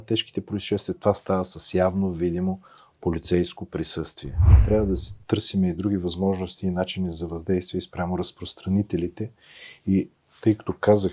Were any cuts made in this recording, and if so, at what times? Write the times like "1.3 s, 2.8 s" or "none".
4.6 s